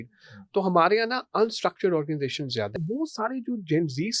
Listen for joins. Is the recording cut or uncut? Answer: cut